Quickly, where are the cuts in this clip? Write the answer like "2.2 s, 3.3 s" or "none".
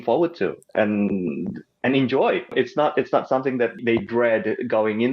2.5 s, 3.8 s